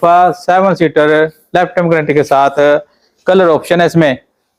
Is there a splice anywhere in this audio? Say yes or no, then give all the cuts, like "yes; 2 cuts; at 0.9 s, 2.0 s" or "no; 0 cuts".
no; 0 cuts